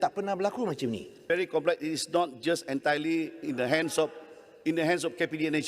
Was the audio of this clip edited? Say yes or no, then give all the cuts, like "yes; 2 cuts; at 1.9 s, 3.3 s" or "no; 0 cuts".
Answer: yes; 1 cut; at 1.2 s